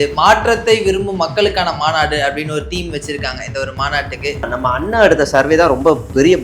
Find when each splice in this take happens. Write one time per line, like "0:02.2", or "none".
0:04.5